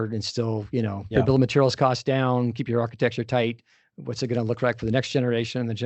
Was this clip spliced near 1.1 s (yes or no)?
yes